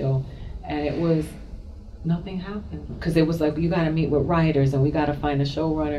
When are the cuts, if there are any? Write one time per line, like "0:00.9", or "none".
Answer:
0:02.9

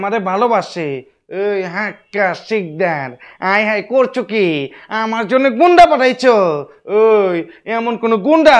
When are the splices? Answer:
none

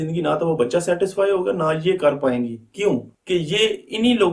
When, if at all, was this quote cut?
0:03.1

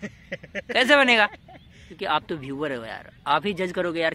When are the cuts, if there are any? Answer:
0:01.8

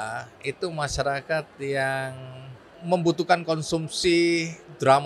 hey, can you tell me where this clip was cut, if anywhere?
none

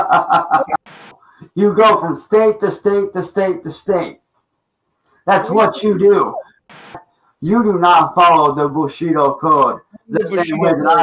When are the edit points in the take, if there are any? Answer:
0:01.0
0:06.9

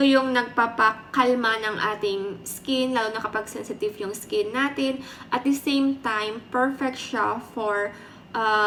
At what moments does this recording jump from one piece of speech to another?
none

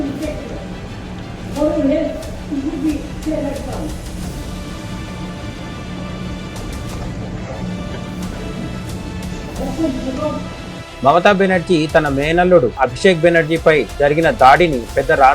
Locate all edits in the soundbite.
0:11.0

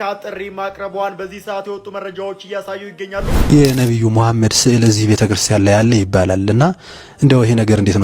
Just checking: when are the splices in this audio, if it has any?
0:03.4

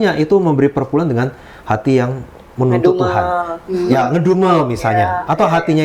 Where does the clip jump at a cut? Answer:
none

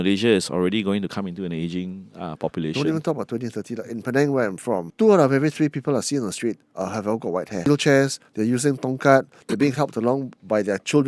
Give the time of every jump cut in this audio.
0:04.9
0:07.7

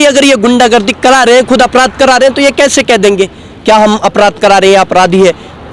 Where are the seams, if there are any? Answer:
none

